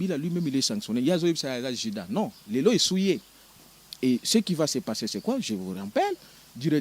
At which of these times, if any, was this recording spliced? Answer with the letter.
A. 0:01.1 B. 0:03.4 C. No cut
B